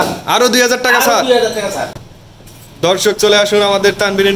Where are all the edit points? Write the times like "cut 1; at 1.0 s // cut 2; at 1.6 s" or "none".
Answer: none